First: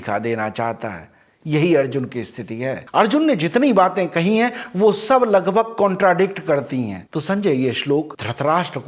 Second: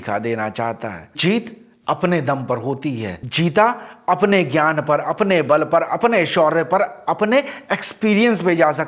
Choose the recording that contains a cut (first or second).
second